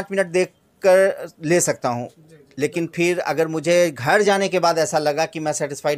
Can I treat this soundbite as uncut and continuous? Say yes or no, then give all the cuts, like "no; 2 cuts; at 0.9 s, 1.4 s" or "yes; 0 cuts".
yes; 0 cuts